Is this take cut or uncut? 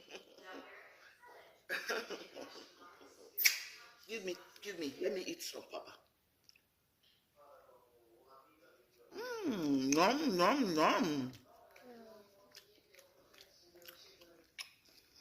uncut